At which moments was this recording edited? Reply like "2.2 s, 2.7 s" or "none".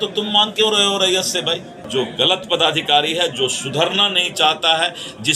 1.9 s